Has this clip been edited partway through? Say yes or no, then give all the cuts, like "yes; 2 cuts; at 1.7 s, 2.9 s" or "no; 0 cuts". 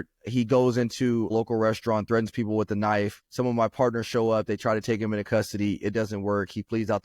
no; 0 cuts